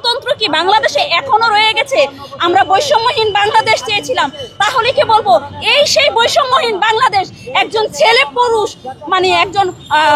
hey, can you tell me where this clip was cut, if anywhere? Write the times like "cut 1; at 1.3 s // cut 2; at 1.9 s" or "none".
none